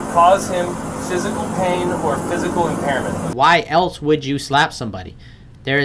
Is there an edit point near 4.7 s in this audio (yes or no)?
no